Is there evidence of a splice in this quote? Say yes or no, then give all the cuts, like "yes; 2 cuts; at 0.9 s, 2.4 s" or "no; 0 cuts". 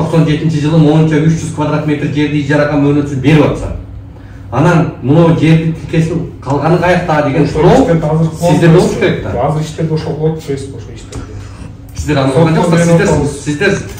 no; 0 cuts